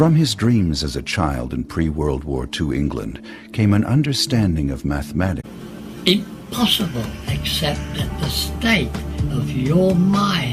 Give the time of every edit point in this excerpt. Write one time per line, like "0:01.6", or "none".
none